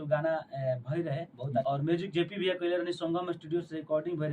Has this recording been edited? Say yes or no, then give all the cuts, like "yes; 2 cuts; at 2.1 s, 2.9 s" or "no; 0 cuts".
yes; 1 cut; at 1.6 s